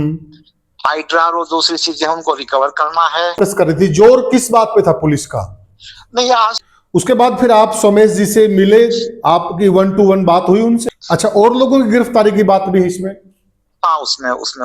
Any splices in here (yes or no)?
yes